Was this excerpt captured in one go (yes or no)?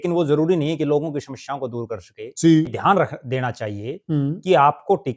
no